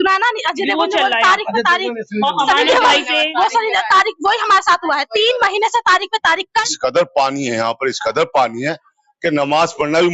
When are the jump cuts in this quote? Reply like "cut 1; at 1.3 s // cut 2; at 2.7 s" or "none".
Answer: cut 1; at 6.4 s